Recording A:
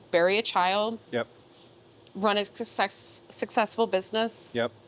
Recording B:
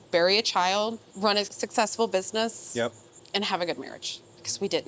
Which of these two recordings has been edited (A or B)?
B